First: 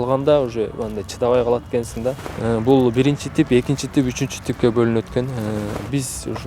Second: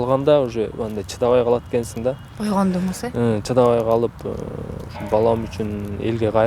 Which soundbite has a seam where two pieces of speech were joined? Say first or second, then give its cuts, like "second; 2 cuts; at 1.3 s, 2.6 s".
first; 2 cuts; at 2.3 s, 5.7 s